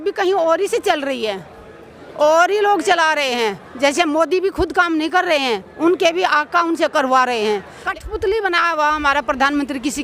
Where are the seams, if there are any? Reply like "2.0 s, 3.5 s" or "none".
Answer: 7.8 s